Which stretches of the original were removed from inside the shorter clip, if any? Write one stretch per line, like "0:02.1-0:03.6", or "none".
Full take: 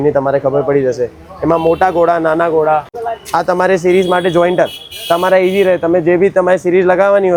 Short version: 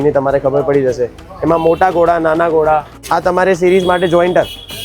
0:03.0-0:03.2